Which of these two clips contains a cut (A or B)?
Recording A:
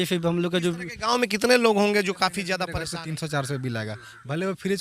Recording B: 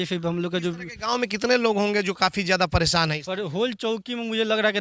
A